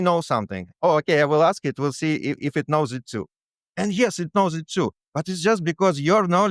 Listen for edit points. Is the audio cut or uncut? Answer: cut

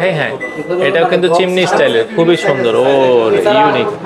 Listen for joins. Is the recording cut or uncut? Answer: uncut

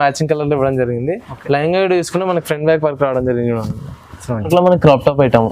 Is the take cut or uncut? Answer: cut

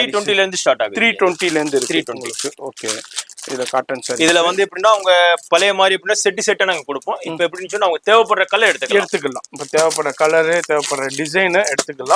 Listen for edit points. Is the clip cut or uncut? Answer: uncut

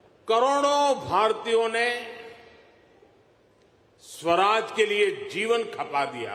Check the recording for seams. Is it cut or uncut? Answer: uncut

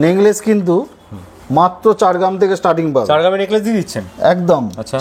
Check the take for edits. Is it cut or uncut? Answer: uncut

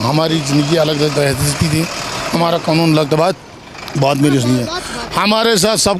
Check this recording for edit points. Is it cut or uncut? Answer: uncut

